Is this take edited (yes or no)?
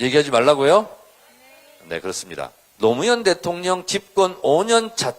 yes